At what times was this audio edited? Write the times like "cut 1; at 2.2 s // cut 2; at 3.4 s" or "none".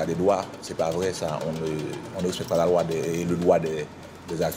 none

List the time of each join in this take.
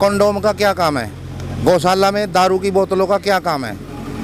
none

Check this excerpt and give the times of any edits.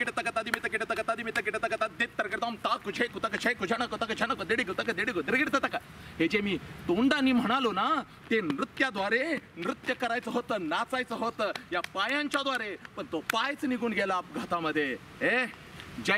cut 1; at 12.6 s

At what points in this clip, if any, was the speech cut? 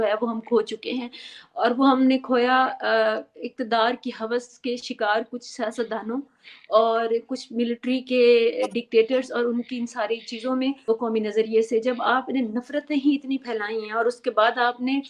cut 1; at 10.9 s

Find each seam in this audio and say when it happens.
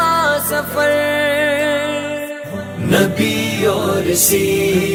none

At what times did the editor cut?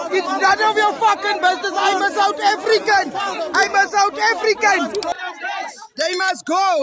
cut 1; at 5.1 s

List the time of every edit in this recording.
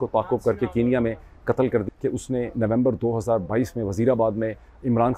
cut 1; at 1.8 s

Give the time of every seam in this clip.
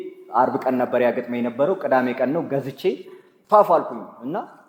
none

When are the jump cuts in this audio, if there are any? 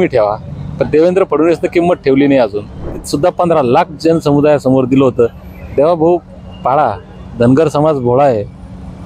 cut 1; at 3.0 s

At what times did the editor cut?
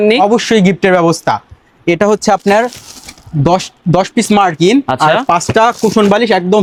none

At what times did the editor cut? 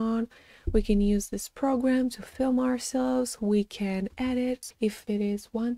cut 1; at 4.6 s

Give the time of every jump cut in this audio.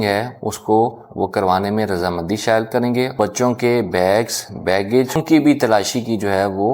cut 1; at 3.1 s // cut 2; at 5.2 s

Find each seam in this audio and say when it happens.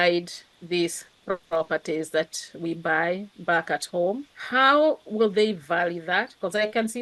cut 1; at 4.3 s

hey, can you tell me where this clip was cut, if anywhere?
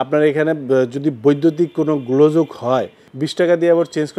cut 1; at 3.2 s

